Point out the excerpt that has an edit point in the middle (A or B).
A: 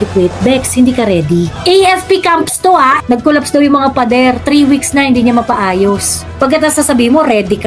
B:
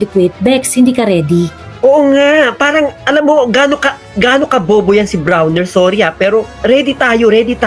A